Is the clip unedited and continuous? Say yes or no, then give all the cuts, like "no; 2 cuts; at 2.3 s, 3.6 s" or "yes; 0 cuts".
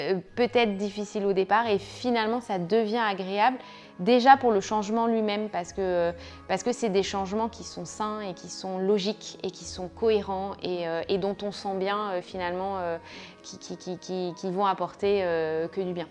yes; 0 cuts